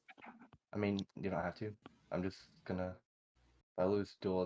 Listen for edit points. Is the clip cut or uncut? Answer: uncut